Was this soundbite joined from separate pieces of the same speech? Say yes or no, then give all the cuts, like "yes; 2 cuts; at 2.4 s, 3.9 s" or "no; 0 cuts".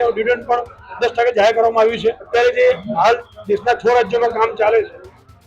yes; 1 cut; at 2.2 s